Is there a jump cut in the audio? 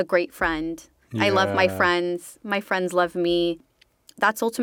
yes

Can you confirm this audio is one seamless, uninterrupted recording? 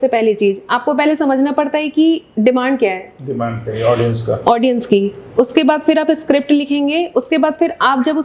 yes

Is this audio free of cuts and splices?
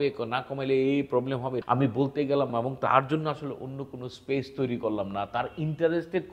no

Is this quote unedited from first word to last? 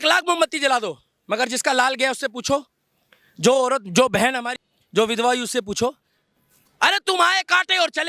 no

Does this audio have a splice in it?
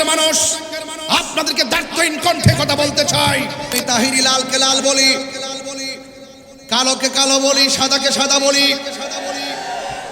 yes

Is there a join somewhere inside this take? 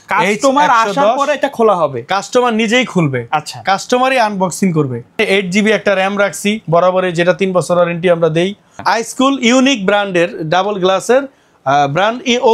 yes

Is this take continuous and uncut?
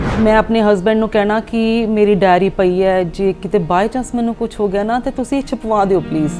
yes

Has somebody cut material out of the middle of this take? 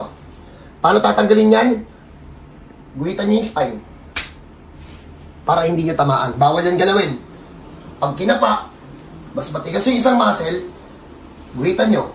no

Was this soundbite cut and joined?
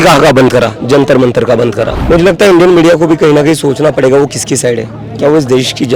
yes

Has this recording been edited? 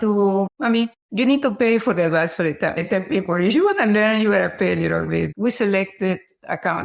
yes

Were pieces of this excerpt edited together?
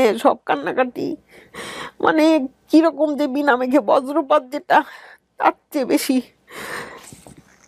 no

